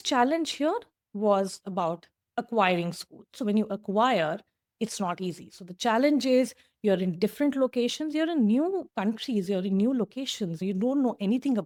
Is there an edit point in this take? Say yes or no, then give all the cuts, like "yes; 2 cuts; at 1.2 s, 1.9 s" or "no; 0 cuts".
no; 0 cuts